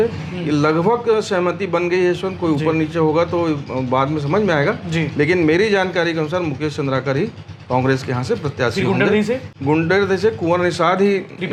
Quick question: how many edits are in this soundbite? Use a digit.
0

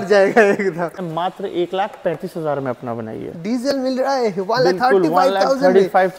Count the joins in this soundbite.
1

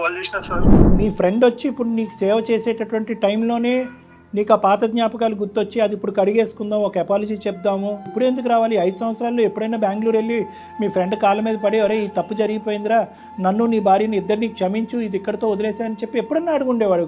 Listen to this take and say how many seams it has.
2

